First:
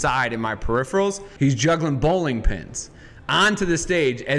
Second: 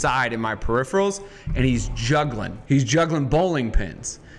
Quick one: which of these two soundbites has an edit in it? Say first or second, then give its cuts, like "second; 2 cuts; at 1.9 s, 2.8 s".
first; 1 cut; at 1.3 s